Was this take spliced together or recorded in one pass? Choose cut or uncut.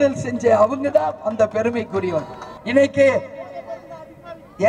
cut